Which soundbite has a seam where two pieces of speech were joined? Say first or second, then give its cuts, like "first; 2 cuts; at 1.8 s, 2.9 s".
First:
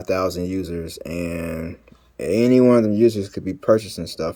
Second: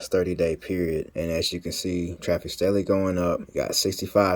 second; 3 cuts; at 1.1 s, 2.2 s, 3.5 s